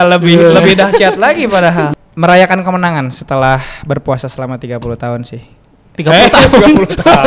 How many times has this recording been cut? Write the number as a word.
one